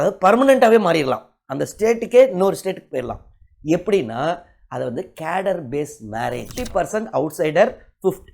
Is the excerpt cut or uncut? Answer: cut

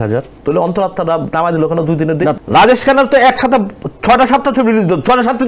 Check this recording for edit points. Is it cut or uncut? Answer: cut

